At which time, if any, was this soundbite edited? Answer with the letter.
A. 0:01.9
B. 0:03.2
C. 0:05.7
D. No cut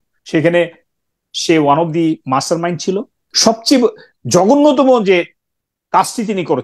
B